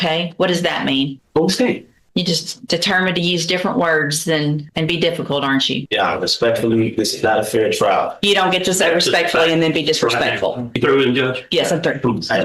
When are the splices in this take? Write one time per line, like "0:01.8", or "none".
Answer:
0:01.2
0:01.9
0:04.7
0:05.8
0:10.8